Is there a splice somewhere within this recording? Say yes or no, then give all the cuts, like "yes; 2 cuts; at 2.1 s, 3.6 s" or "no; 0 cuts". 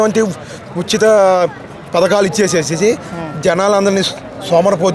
no; 0 cuts